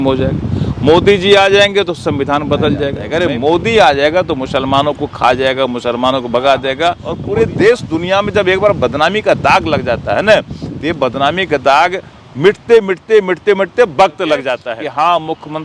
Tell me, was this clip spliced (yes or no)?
yes